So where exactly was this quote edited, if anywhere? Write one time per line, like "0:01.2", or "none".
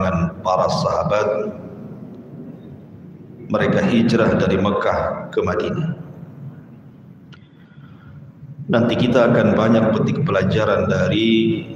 none